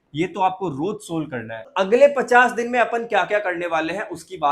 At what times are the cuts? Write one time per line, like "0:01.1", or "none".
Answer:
0:01.7